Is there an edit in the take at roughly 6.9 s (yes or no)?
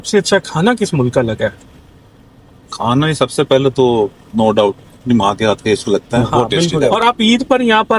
yes